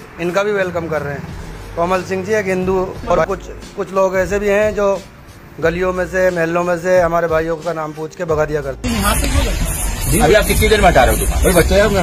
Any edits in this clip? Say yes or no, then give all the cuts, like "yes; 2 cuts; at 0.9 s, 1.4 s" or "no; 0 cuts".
yes; 2 cuts; at 3.2 s, 8.8 s